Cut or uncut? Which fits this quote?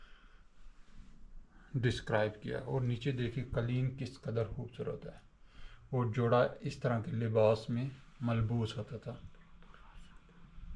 uncut